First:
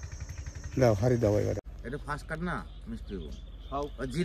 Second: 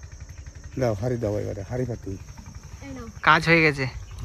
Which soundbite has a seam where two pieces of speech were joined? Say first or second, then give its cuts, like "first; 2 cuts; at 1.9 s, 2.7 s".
first; 1 cut; at 1.6 s